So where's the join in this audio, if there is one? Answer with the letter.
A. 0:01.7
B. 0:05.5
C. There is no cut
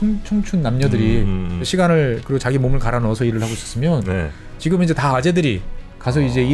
A